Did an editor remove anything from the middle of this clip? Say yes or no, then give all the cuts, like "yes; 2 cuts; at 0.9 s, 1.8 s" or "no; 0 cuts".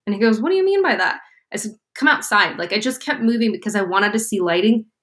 no; 0 cuts